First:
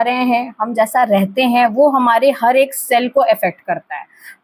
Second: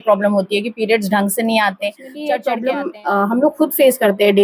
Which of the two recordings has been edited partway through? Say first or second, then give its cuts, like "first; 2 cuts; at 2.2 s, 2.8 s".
second; 1 cut; at 2.2 s